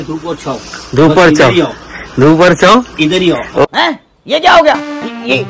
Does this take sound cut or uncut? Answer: uncut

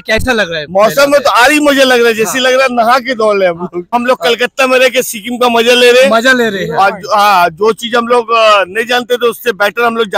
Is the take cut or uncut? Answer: cut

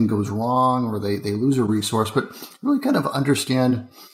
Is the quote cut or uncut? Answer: uncut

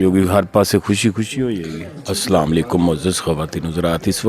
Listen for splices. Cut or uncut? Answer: cut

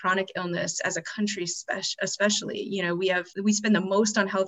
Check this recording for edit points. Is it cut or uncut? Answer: cut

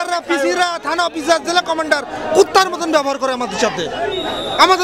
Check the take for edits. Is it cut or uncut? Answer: uncut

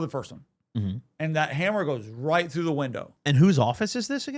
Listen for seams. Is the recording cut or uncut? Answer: cut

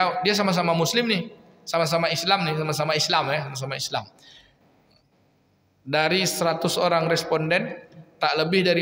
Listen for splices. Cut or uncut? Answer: uncut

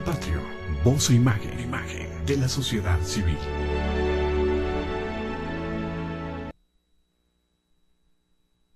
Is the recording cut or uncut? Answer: cut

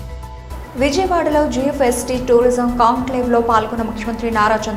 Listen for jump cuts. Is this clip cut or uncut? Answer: uncut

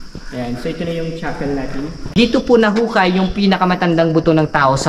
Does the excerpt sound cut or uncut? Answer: cut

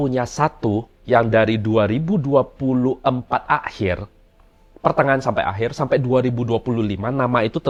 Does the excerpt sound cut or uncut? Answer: uncut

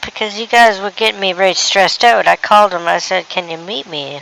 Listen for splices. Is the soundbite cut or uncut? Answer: uncut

